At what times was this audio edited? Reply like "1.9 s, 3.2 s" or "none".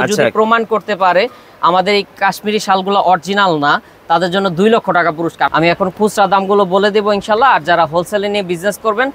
5.5 s